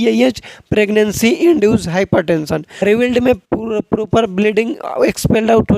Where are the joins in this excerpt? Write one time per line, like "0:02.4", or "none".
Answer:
0:02.7